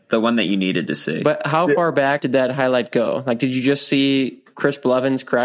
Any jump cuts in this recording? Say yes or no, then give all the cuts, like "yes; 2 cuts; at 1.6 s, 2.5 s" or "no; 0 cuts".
yes; 1 cut; at 2.2 s